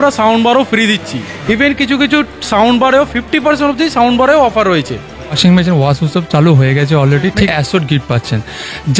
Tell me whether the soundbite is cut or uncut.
cut